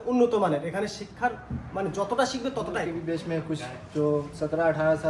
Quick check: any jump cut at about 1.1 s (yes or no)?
no